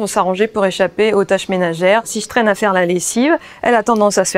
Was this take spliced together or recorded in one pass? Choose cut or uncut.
cut